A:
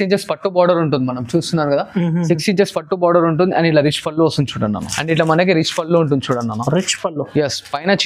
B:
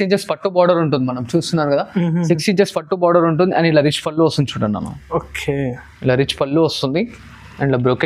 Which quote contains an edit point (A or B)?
A